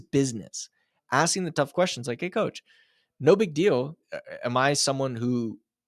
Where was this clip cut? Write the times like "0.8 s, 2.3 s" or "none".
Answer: 4.0 s